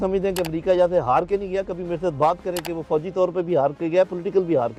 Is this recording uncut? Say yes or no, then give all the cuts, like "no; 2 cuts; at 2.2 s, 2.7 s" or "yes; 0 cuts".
yes; 0 cuts